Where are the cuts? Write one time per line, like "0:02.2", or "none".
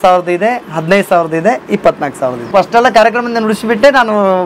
0:02.4